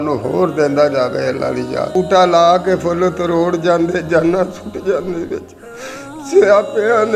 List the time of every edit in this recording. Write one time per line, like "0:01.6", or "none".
0:01.9